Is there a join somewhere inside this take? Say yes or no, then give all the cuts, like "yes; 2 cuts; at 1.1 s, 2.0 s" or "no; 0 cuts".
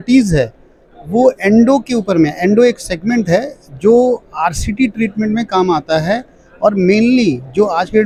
no; 0 cuts